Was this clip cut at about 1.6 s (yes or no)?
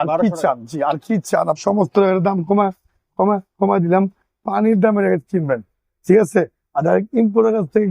yes